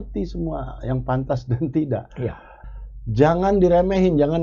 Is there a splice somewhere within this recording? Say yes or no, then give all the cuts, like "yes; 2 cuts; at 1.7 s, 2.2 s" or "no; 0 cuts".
yes; 1 cut; at 2.6 s